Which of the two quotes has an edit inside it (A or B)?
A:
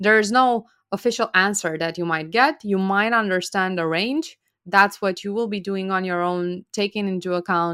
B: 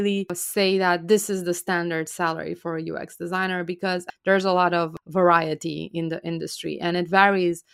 B